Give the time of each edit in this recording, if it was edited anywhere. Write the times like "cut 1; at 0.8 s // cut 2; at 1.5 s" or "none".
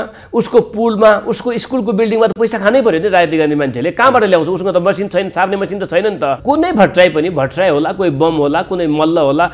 cut 1; at 6.4 s